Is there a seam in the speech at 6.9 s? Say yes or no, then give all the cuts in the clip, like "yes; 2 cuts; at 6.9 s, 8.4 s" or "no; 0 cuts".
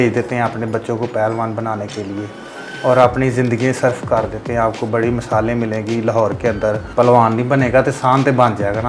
yes; 1 cut; at 6.9 s